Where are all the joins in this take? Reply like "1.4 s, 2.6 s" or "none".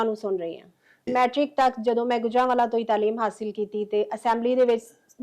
1.1 s